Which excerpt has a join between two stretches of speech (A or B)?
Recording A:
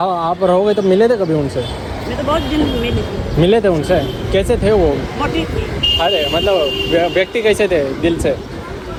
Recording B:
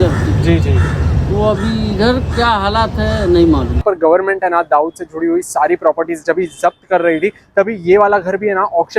B